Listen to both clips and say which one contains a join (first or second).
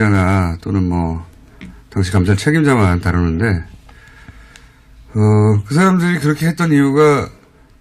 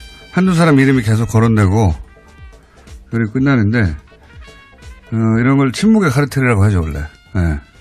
second